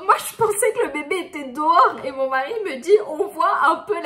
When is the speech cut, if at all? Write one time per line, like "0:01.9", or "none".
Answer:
none